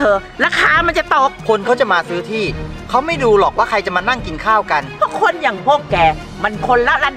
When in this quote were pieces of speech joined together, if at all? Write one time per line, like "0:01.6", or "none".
0:01.4
0:04.9